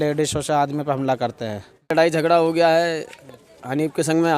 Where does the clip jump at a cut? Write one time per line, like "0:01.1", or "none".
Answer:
0:01.9

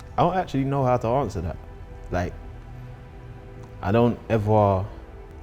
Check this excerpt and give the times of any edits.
none

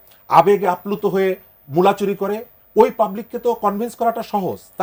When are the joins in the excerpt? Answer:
none

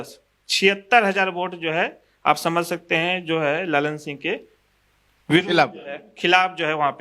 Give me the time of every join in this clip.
none

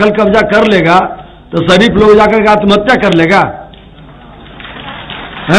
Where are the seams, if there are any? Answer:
none

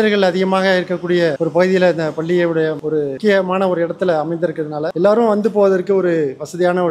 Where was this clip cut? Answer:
none

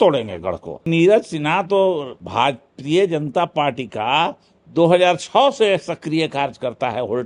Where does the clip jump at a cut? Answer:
0:00.9
0:02.2

